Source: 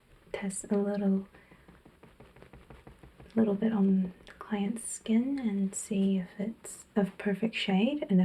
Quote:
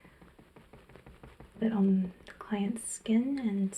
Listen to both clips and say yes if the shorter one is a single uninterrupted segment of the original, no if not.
no